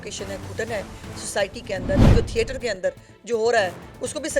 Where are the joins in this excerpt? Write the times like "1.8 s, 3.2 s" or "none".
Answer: 2.1 s